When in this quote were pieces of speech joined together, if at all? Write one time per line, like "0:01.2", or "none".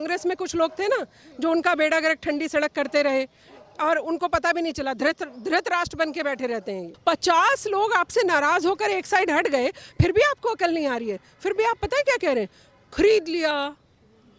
0:06.9